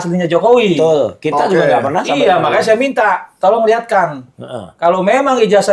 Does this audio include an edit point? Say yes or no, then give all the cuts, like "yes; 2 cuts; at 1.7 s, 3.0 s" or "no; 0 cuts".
no; 0 cuts